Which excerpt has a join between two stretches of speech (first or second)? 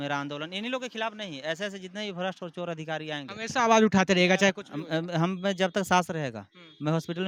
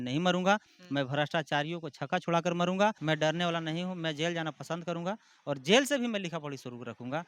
second